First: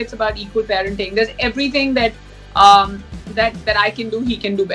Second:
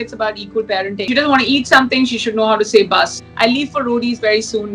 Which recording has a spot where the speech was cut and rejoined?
second; 2 cuts; at 1.0 s, 3.2 s

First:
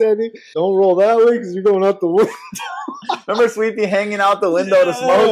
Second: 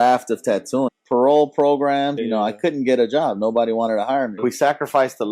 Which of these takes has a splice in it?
second; 3 cuts; at 1.0 s, 2.2 s, 4.4 s

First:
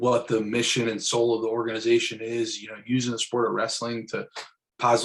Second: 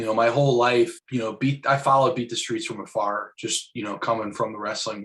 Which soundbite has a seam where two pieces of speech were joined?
second; 1 cut; at 1.0 s

